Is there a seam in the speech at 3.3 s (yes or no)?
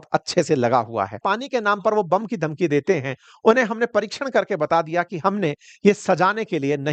no